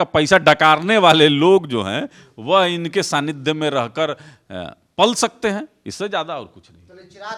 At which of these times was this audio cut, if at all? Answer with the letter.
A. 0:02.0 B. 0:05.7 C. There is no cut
C